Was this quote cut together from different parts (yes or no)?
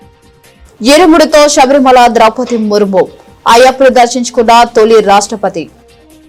no